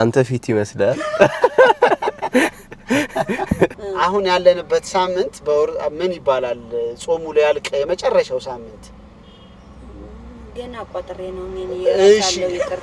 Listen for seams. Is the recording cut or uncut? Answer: cut